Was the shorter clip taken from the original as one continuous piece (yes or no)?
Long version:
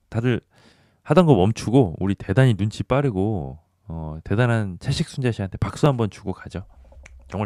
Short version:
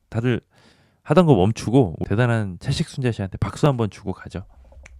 no